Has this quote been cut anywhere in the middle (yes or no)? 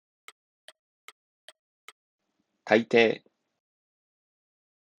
no